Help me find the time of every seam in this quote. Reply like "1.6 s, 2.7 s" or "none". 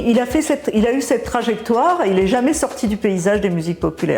none